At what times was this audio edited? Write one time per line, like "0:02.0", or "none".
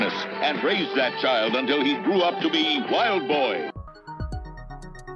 0:03.9